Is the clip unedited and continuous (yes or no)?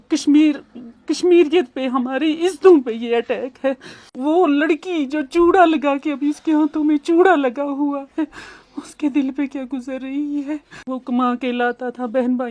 no